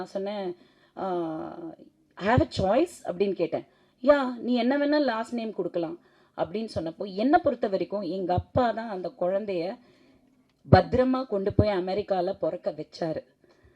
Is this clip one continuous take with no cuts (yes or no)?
yes